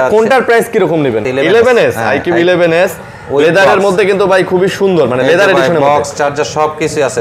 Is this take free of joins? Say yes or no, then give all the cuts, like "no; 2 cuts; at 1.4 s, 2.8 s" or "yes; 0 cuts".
no; 1 cut; at 1.3 s